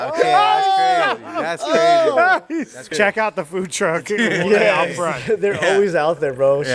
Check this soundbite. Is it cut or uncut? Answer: cut